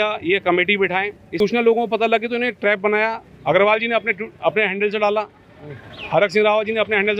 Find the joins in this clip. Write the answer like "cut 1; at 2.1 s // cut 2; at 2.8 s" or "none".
cut 1; at 1.4 s